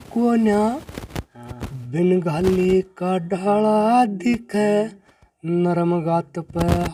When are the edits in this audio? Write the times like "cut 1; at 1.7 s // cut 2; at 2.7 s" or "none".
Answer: none